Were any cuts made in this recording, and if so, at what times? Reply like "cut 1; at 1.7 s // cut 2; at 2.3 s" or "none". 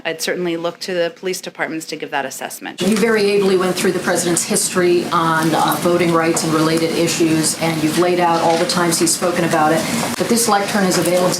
cut 1; at 2.8 s